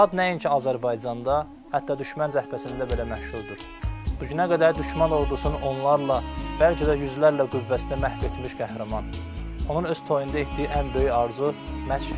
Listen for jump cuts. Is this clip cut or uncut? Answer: uncut